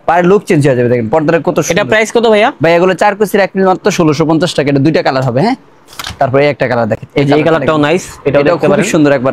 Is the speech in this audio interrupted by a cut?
no; 0 cuts

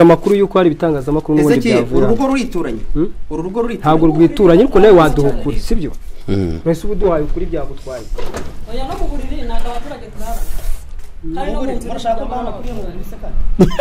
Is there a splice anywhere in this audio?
no; 0 cuts

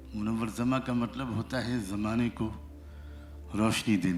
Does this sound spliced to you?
no; 0 cuts

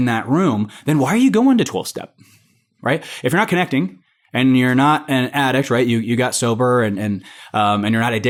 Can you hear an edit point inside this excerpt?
no; 0 cuts

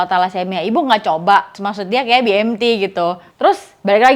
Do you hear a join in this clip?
yes; 2 cuts; at 1.6 s, 3.2 s

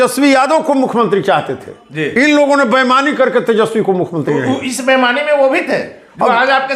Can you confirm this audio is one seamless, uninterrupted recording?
yes; 0 cuts

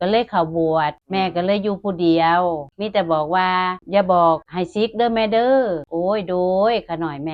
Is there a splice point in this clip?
yes; 5 cuts; at 1.0 s, 2.7 s, 3.8 s, 4.5 s, 5.8 s

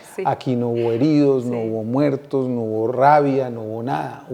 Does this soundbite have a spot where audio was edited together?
no; 0 cuts

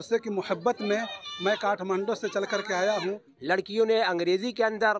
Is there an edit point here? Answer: yes; 1 cut; at 3.3 s

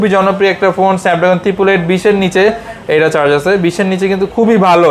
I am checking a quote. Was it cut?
no; 0 cuts

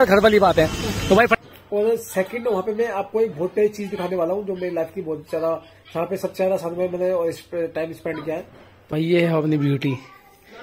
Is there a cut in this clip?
yes; 2 cuts; at 1.4 s, 8.9 s

